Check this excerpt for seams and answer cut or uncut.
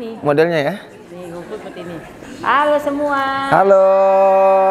uncut